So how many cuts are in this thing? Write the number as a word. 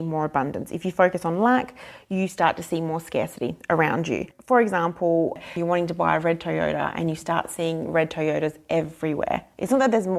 two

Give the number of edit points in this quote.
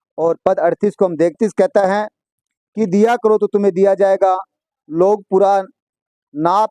one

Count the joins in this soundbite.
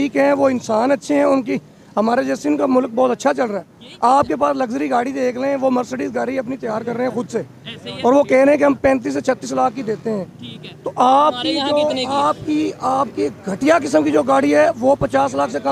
zero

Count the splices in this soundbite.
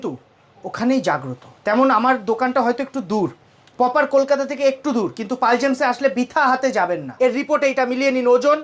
one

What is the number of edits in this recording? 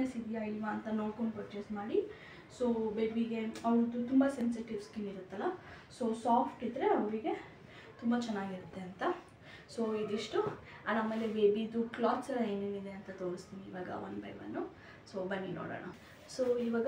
zero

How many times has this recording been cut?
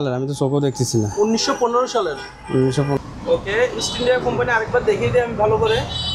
one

